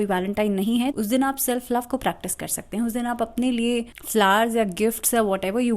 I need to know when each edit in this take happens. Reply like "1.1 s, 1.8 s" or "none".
0.9 s, 4.0 s